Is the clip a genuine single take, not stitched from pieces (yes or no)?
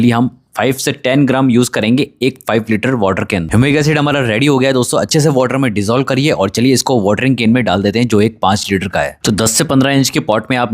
yes